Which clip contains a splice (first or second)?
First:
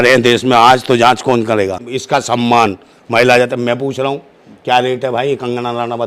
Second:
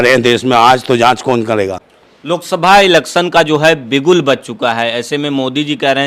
first